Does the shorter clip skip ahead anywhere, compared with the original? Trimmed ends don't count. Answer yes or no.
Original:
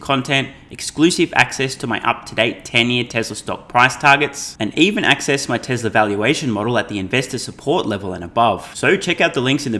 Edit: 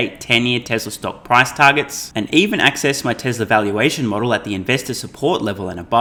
no